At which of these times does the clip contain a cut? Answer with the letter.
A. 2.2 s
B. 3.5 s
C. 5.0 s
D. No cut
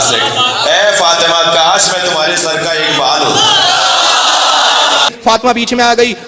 C